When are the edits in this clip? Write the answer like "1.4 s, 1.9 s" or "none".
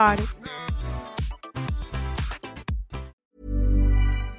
3.1 s